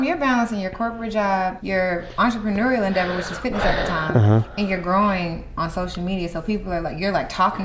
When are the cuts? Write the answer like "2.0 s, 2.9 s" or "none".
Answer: 1.6 s